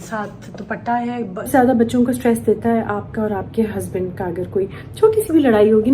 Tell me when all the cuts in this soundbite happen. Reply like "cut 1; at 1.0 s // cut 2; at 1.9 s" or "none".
cut 1; at 1.5 s

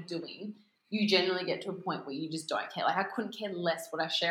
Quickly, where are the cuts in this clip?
none

